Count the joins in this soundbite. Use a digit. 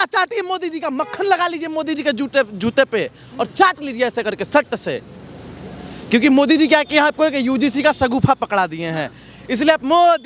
0